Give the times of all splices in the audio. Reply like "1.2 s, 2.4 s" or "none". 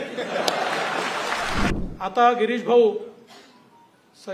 1.7 s